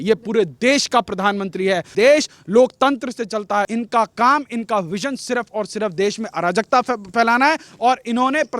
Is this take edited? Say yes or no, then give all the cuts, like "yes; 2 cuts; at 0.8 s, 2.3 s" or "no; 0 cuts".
yes; 2 cuts; at 1.9 s, 3.7 s